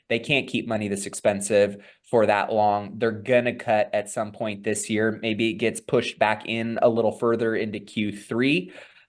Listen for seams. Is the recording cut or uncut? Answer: uncut